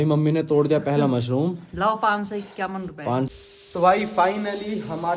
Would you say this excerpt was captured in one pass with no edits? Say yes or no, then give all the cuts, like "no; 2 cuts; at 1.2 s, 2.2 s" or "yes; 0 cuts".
no; 1 cut; at 3.3 s